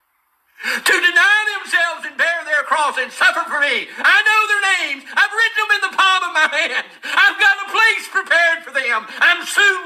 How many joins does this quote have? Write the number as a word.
one